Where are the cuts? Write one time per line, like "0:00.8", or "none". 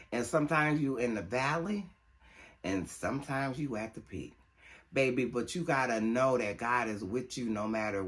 none